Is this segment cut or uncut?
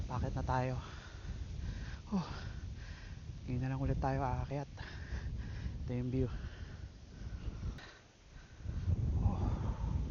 cut